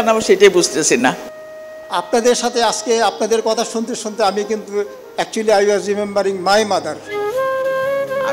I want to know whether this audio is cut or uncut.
cut